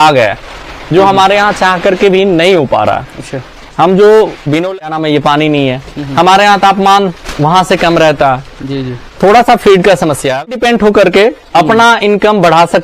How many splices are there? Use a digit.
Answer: 2